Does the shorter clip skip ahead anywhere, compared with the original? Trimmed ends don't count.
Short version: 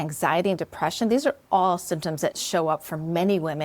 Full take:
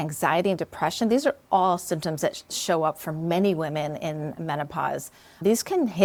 yes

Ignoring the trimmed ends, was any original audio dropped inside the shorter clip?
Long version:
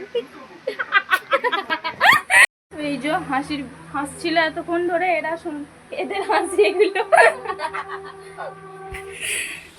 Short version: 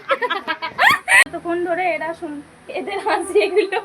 yes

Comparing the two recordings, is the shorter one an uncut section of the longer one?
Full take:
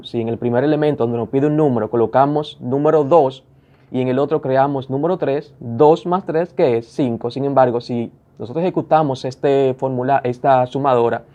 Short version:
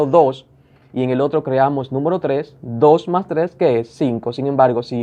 yes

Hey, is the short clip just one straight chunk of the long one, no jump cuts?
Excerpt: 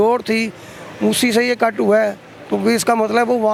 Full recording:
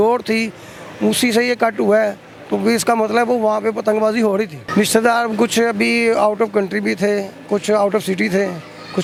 yes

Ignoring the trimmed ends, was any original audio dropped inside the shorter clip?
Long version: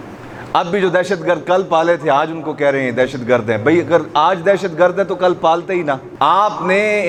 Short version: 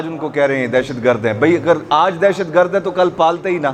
no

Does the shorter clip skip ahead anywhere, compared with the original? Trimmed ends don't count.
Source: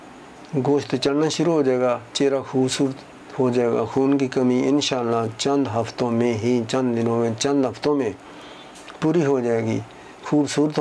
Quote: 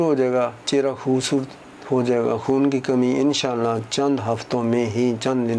no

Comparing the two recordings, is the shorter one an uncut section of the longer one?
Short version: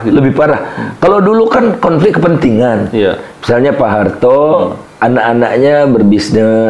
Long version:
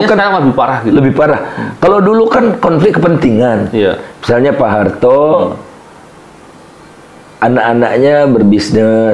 no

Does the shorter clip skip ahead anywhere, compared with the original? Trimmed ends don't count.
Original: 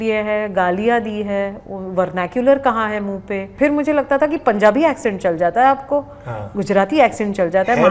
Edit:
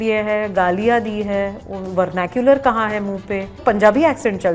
yes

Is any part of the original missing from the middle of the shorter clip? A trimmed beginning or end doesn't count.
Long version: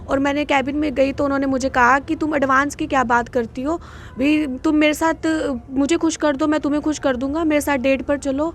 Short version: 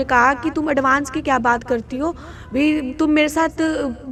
no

